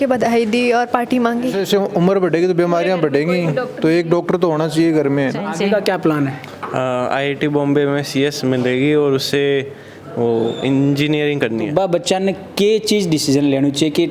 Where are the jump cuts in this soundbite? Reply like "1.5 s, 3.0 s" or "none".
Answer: 1.6 s, 5.5 s, 11.7 s